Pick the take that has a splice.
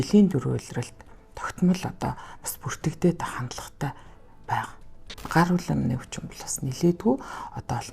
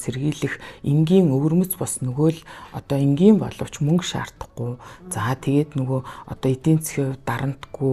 first; 1 cut; at 5.2 s

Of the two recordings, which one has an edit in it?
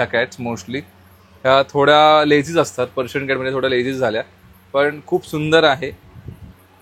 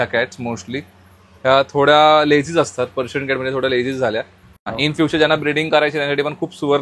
second; 1 cut; at 4.6 s

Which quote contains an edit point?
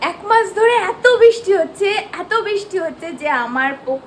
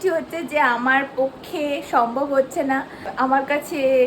second; 1 cut; at 3.1 s

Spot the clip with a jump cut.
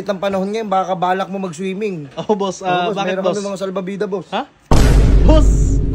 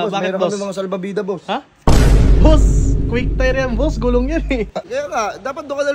second; 1 cut; at 4.9 s

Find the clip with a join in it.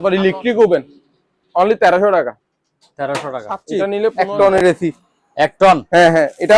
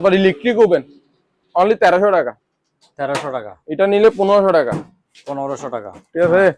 first; 1 cut; at 4.1 s

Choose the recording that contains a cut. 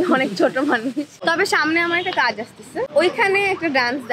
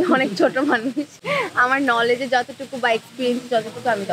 first; 2 cuts; at 1.1 s, 2.9 s

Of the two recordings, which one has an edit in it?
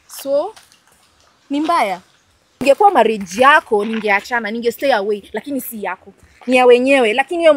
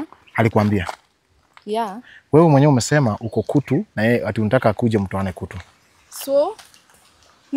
first; 1 cut; at 2.6 s

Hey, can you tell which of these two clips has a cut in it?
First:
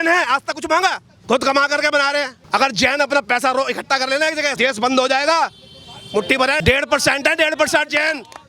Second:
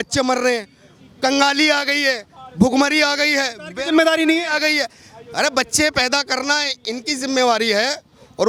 first; 4 cuts; at 1.1 s, 2.4 s, 4.5 s, 6.6 s

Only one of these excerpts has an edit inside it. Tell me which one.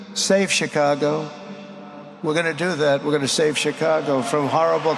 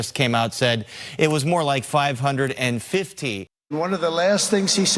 second; 1 cut; at 3.5 s

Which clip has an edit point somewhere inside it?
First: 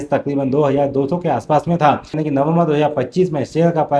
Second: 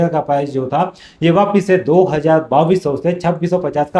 first; 1 cut; at 2.2 s

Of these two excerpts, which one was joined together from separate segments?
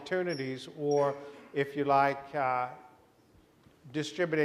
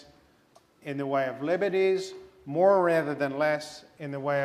first; 1 cut; at 1.0 s

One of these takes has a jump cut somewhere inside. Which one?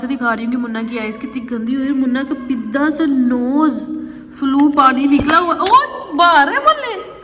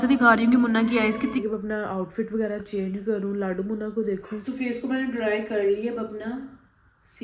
second; 2 cuts; at 1.4 s, 4.4 s

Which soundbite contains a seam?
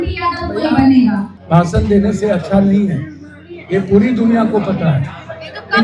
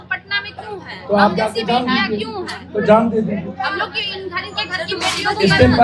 first; 1 cut; at 1.3 s

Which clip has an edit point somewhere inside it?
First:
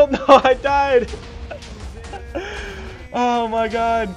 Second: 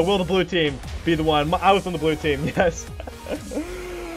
second; 1 cut; at 2.8 s

